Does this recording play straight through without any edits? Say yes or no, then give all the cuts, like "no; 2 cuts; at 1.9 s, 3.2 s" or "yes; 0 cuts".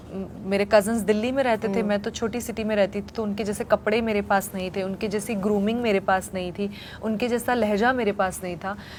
yes; 0 cuts